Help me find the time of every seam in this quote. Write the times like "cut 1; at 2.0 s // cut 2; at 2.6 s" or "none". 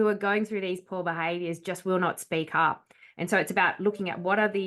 none